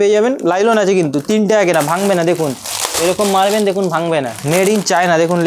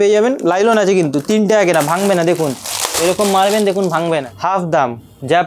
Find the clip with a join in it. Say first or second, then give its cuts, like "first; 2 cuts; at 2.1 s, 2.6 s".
second; 1 cut; at 4.5 s